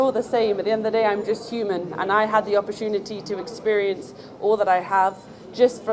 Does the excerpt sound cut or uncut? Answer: uncut